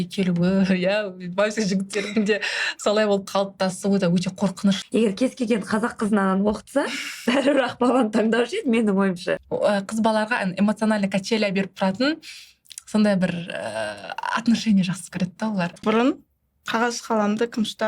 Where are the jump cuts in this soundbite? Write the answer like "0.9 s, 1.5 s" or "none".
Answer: 4.8 s, 9.4 s, 15.8 s